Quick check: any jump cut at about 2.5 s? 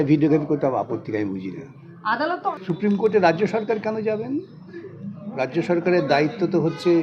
yes; 1 cut; at 2.5 s

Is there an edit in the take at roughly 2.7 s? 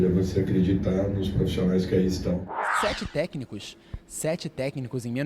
yes; 1 cut; at 2.7 s

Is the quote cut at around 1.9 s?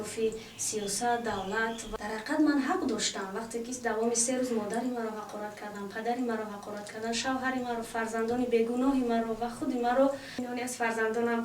yes; 2 cuts; at 1.9 s, 10.3 s

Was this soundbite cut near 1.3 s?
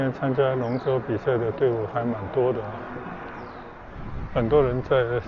no; 1 cut; at 3.7 s

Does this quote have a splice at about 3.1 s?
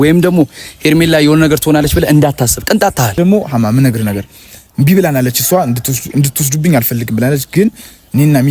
yes; 1 cut; at 3.1 s

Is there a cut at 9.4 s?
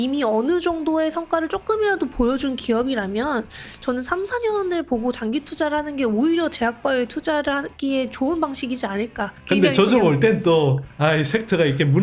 yes; 1 cut; at 9.4 s

